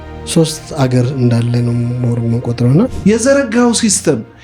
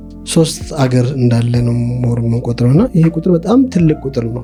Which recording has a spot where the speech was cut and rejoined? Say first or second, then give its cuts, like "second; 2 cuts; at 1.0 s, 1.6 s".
first; 1 cut; at 2.9 s